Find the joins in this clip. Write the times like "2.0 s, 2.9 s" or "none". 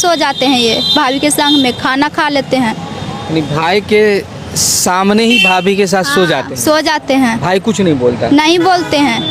none